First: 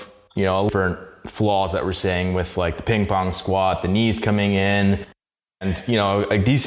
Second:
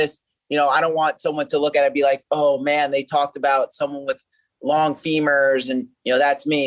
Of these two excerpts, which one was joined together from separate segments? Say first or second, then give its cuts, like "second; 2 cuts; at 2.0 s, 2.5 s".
first; 2 cuts; at 0.7 s, 5.6 s